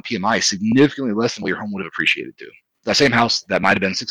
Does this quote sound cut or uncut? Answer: cut